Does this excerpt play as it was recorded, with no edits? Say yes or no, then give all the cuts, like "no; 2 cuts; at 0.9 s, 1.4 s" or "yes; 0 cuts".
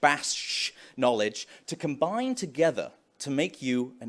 yes; 0 cuts